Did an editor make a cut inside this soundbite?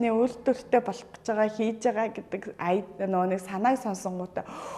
no; 0 cuts

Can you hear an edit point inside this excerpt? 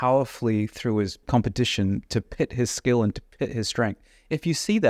yes; 1 cut; at 1.2 s

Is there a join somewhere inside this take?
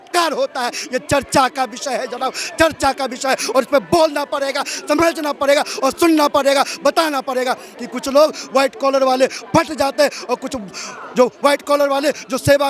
no; 0 cuts

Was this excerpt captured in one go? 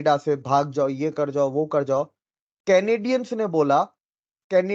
yes; 0 cuts

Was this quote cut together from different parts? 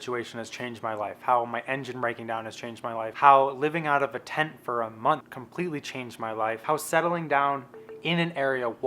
yes; 3 cuts; at 3.1 s, 5.4 s, 6.6 s

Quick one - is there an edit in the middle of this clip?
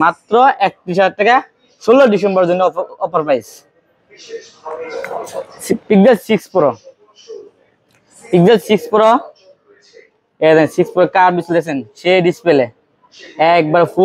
no; 0 cuts

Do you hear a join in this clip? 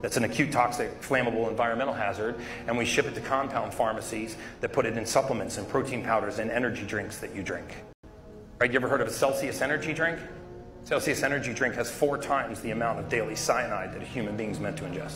no; 0 cuts

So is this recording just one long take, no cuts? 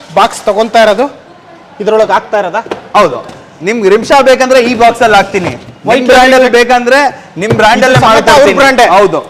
yes; 0 cuts

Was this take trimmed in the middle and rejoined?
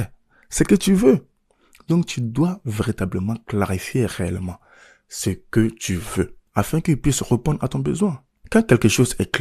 yes; 1 cut; at 6.4 s

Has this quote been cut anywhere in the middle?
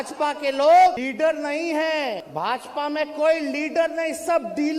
yes; 2 cuts; at 1.0 s, 2.3 s

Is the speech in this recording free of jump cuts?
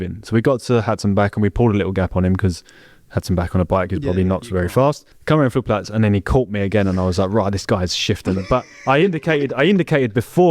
no; 1 cut; at 5.1 s

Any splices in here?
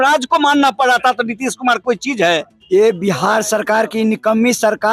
yes; 1 cut; at 2.5 s

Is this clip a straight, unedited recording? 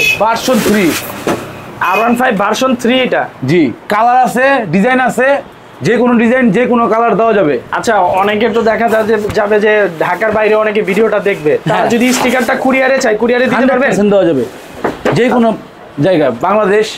yes; 0 cuts

